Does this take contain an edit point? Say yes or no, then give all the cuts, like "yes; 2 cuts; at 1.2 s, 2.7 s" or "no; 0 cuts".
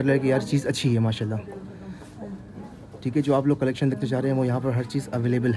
no; 0 cuts